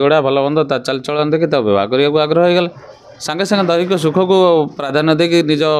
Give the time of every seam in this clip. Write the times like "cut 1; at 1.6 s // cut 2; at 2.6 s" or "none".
none